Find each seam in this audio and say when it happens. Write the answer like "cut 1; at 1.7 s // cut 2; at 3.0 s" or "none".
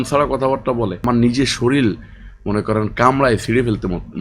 cut 1; at 1.0 s